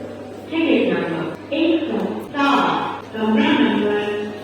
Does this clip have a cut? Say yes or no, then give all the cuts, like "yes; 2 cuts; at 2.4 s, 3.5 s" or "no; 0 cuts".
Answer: yes; 3 cuts; at 1.4 s, 2.2 s, 3.0 s